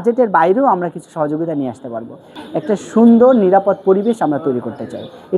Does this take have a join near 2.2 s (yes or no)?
yes